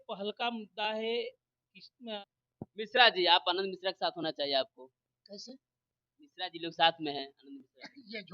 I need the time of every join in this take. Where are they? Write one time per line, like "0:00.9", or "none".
0:02.2

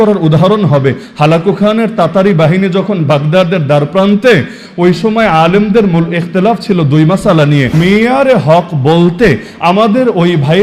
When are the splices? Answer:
0:07.6

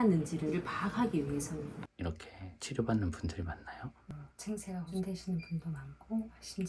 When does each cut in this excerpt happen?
0:01.8
0:04.1

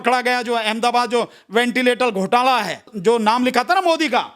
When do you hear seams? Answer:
0:02.9

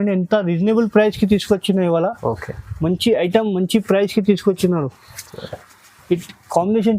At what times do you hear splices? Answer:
none

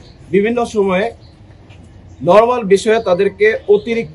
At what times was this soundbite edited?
none

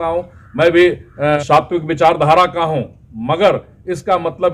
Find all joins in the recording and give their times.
0:01.4

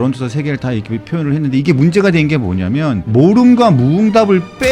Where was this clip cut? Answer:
0:03.1

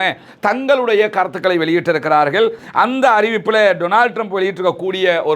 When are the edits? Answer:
0:02.6

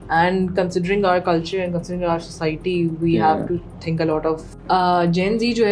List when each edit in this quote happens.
0:04.5

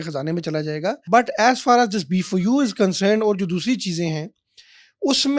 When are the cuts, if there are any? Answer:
0:01.0

